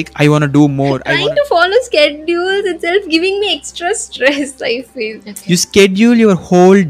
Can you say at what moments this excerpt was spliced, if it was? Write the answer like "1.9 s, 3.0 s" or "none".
1.1 s, 5.3 s